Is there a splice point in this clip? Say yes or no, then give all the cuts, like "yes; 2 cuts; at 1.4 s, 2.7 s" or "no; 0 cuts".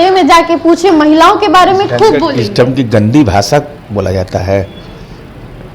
no; 0 cuts